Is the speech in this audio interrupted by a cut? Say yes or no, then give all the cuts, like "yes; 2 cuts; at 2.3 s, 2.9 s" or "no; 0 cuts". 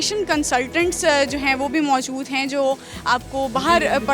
no; 0 cuts